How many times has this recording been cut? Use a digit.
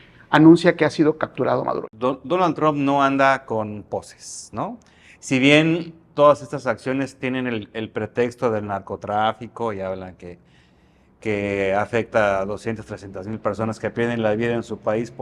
1